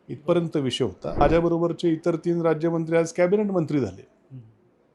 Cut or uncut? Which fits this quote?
cut